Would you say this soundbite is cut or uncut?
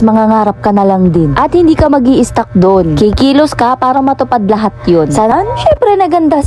cut